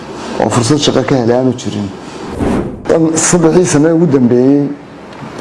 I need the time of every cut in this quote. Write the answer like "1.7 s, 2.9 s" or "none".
2.3 s